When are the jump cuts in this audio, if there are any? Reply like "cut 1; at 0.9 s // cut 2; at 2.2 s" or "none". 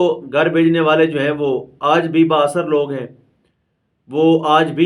none